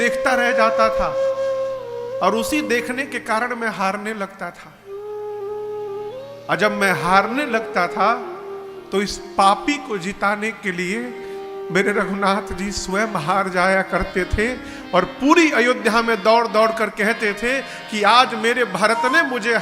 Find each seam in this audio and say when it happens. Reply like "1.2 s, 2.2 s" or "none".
none